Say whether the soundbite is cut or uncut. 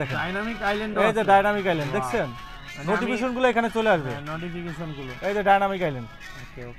uncut